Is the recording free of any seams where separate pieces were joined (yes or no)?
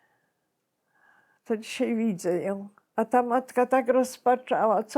no